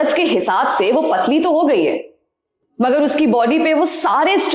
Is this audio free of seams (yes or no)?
yes